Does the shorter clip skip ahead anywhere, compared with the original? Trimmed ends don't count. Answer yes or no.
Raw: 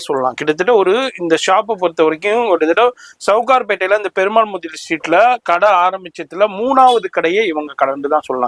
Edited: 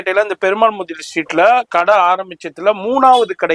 no